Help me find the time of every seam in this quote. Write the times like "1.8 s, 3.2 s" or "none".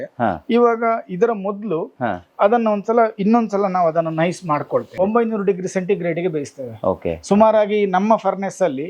5.0 s